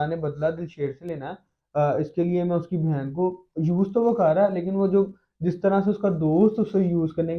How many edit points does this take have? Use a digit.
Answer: 0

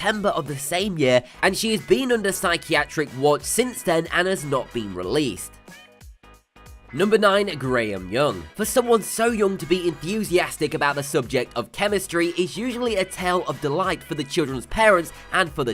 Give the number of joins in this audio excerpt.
1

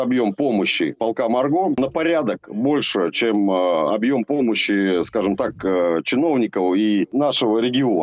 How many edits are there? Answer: 3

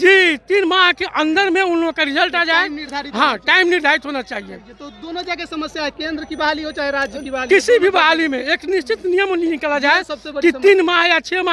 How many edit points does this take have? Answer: 0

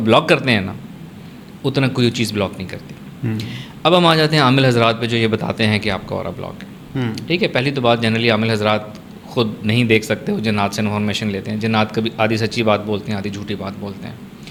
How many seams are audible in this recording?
0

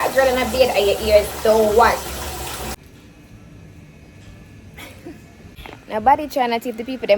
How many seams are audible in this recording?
2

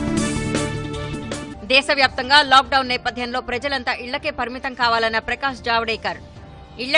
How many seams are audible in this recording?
1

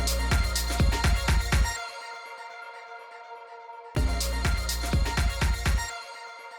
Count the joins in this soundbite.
0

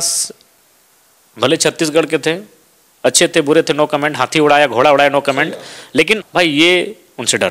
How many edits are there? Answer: 1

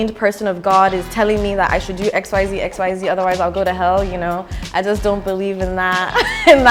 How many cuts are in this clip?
0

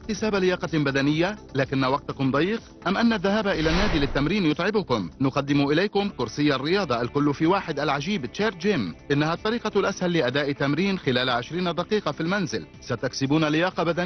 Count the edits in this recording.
0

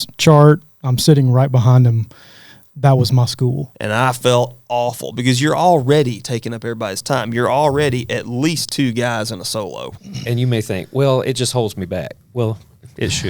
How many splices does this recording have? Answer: 2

